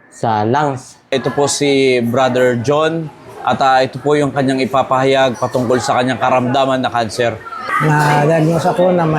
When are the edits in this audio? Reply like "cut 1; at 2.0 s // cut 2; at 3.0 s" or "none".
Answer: cut 1; at 1.1 s // cut 2; at 7.6 s